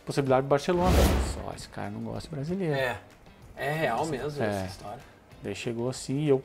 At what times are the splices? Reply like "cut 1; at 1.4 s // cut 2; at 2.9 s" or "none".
cut 1; at 1.1 s